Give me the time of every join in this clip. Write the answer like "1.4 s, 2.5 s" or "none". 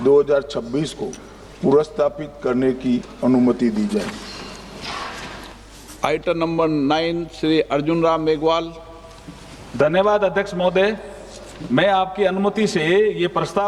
none